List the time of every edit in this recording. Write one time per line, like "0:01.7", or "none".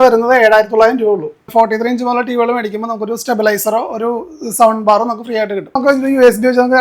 0:01.5
0:05.8

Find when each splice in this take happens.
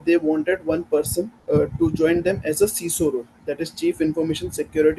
0:01.4

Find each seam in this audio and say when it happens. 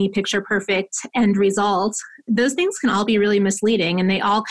0:02.1

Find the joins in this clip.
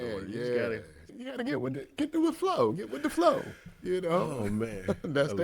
0:01.2

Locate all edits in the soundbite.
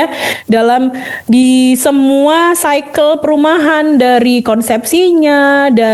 none

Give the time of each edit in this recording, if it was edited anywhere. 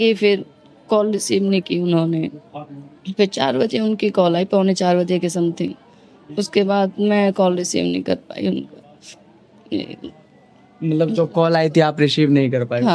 none

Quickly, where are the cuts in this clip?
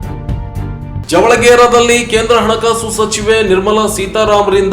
0:01.0

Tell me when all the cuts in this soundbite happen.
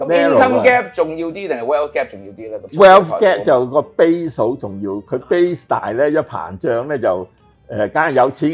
0:02.7

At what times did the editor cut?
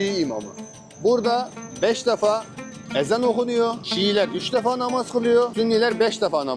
none

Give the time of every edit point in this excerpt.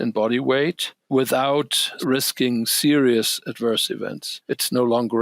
0:00.9
0:02.0
0:04.3

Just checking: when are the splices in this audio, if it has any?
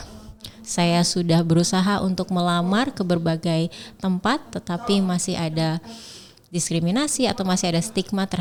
none

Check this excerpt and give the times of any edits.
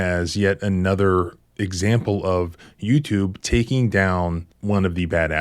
0:04.5

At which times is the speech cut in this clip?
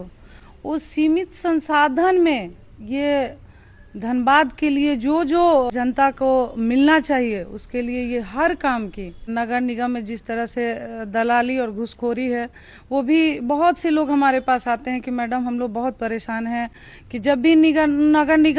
0:05.7
0:09.3

